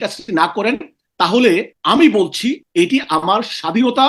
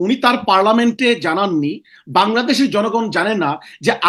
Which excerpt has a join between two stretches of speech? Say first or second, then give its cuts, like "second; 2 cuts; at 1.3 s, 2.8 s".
first; 2 cuts; at 1.7 s, 2.6 s